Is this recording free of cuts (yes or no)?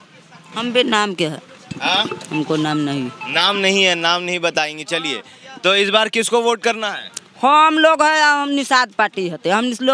yes